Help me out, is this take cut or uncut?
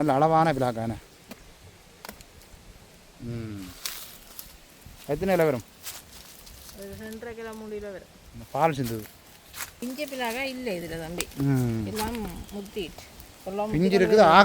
cut